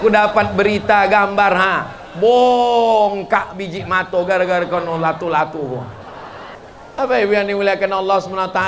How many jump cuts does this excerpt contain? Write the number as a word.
one